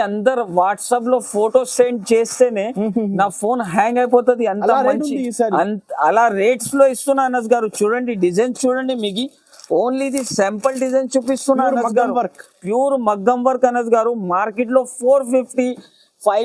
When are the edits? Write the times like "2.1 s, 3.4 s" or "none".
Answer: none